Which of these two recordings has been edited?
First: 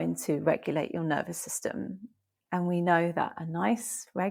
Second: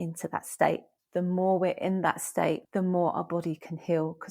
second; 2 cuts; at 0.9 s, 2.6 s

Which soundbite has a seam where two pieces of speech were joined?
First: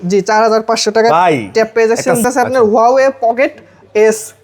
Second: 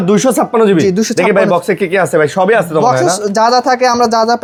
first; 1 cut; at 2.2 s

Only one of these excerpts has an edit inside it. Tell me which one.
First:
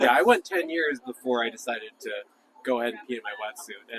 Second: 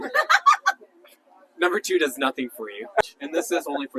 second; 1 cut; at 3.0 s

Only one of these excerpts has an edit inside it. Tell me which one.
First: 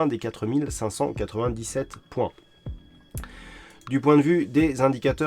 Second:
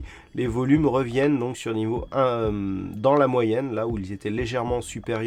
first; 2 cuts; at 2.5 s, 3.7 s

